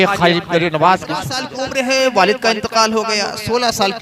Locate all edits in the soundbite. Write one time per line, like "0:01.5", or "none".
0:01.5